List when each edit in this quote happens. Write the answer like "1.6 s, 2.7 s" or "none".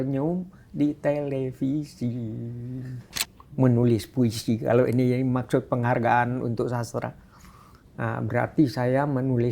3.2 s

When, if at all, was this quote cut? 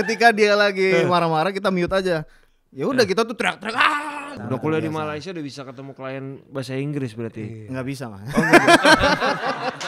4.4 s

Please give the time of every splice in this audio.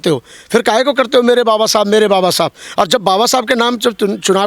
none

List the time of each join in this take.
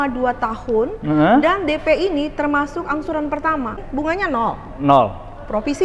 3.8 s

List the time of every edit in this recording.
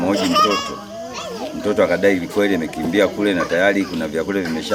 none

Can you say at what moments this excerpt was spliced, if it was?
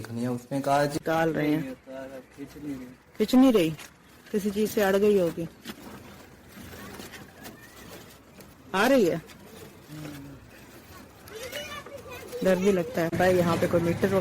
0.9 s, 13.1 s

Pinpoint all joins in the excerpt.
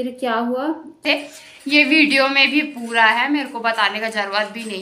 1.0 s

